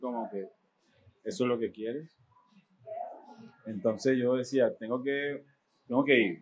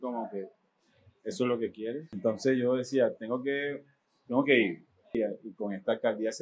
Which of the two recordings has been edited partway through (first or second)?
second